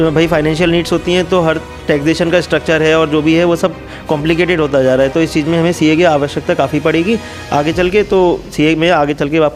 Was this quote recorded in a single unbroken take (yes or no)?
yes